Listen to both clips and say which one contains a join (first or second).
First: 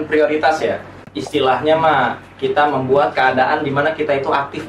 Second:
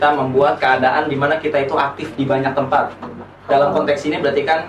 first